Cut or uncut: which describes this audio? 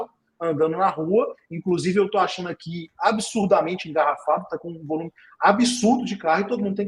uncut